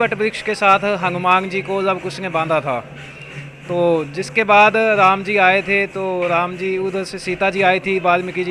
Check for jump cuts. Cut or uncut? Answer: uncut